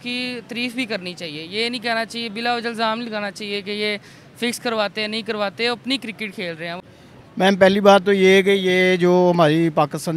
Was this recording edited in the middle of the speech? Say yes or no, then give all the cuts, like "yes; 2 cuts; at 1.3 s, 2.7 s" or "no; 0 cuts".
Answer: yes; 1 cut; at 6.8 s